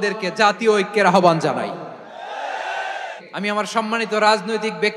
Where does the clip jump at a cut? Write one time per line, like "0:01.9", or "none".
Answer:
0:03.2